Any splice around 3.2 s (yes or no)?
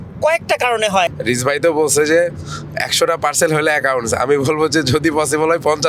no